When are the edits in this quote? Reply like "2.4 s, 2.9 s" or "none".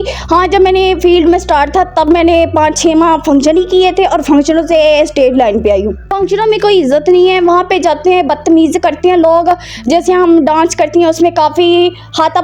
6.1 s